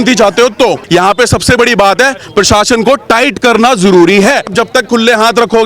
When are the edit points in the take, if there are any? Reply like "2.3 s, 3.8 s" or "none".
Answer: 0.8 s, 4.5 s